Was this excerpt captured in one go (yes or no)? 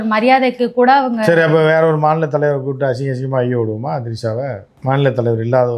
yes